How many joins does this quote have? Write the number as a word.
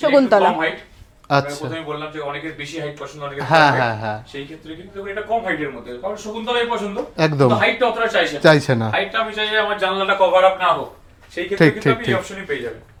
zero